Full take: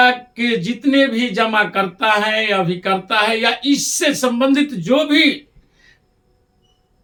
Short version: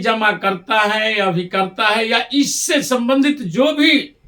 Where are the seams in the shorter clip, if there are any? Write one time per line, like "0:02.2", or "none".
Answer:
none